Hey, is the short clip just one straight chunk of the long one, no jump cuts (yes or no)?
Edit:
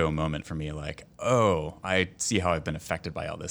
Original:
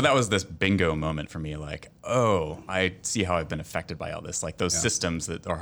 yes